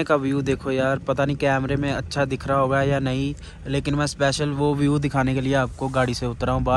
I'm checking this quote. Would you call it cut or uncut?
uncut